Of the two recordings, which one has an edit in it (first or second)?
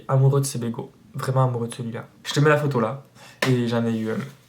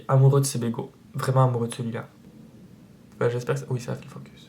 first